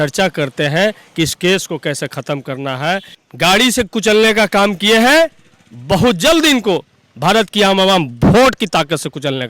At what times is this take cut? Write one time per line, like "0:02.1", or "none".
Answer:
0:03.1